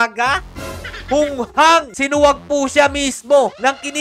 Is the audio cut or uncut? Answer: cut